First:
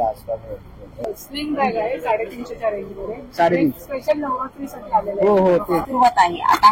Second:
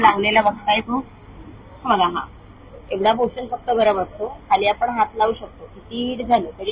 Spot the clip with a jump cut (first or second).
first